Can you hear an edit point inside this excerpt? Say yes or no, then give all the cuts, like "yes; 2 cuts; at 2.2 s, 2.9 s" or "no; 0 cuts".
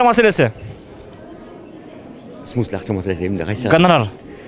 no; 0 cuts